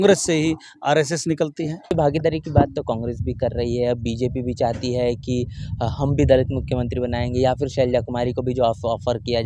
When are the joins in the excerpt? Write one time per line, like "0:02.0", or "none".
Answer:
0:01.9